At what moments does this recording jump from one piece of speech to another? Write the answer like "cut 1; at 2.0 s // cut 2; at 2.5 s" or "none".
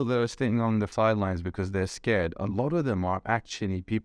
cut 1; at 0.9 s